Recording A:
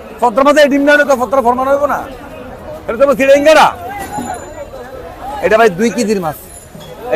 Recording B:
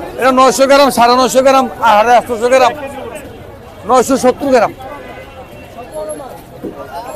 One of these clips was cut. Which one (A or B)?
A